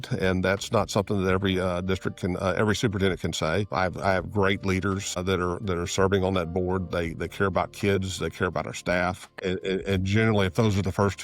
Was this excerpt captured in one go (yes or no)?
no